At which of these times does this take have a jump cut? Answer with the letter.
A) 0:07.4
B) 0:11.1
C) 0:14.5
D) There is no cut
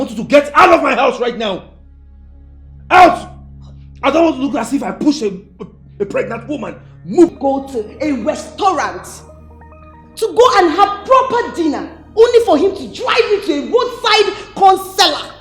A